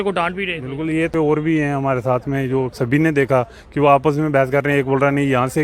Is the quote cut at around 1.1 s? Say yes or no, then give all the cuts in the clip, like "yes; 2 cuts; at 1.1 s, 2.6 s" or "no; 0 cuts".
yes; 1 cut; at 1.1 s